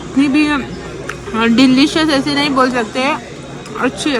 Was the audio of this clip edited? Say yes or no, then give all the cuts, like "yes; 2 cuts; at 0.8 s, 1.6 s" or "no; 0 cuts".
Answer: no; 0 cuts